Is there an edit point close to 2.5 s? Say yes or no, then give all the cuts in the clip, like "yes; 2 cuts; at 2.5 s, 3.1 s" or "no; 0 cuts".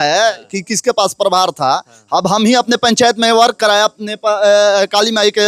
no; 0 cuts